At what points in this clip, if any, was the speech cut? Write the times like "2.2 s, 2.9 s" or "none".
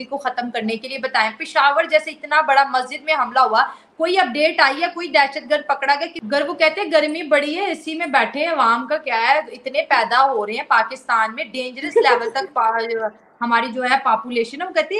6.1 s